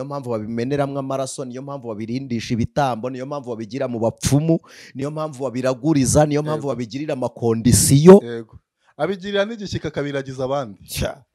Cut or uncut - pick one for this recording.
uncut